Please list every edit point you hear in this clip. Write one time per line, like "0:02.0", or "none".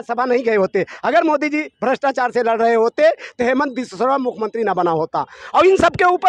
none